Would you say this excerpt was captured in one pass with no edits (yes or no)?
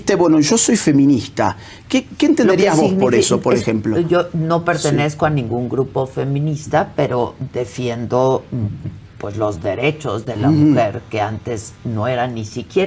yes